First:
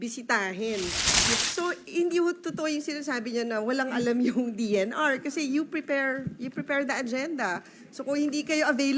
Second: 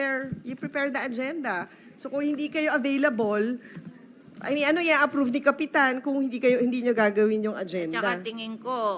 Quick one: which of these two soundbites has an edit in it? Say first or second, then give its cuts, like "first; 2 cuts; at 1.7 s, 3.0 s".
first; 1 cut; at 1.4 s